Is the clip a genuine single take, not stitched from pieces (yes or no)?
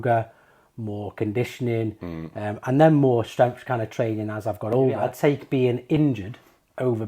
no